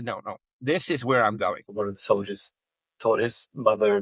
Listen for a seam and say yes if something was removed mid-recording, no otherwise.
yes